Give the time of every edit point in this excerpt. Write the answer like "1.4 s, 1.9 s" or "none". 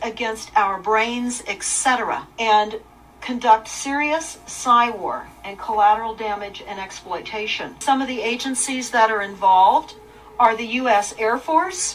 2.3 s, 7.8 s